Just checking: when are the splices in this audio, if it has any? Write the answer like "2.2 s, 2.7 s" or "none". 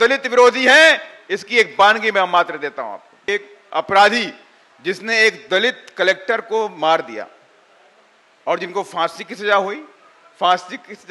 3.2 s